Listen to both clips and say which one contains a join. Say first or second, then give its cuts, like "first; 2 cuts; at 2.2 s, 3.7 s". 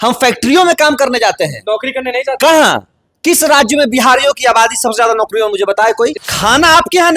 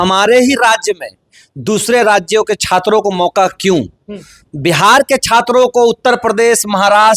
first; 1 cut; at 6.2 s